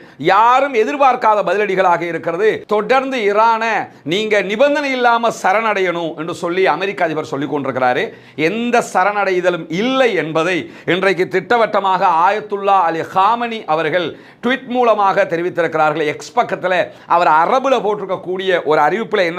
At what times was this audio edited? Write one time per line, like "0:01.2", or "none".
0:02.6